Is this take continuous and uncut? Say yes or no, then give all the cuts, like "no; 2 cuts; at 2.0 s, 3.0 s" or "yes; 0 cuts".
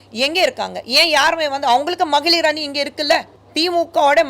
no; 1 cut; at 3.4 s